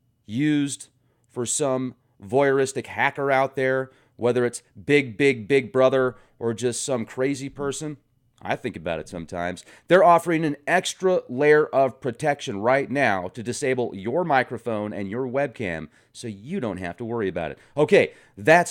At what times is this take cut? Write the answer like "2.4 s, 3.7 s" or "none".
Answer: 10.5 s